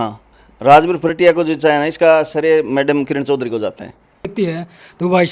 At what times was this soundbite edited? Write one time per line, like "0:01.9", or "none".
0:04.3